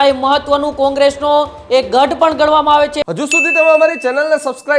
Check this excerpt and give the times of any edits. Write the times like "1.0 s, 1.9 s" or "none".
3.0 s